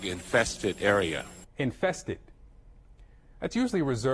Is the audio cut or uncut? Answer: cut